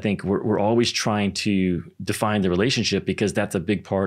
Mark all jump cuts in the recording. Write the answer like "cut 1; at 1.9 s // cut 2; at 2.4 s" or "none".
none